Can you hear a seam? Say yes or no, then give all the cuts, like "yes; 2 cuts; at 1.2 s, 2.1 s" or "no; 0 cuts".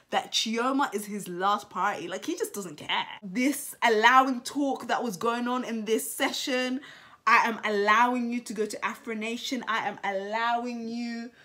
yes; 1 cut; at 3.2 s